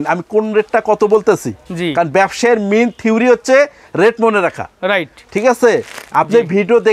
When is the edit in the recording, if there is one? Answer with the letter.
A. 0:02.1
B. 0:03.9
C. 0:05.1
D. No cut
D